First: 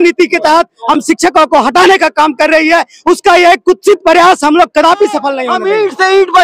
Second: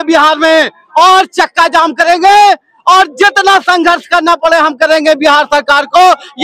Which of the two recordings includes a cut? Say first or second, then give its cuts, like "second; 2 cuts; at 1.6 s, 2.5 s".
first; 1 cut; at 5.4 s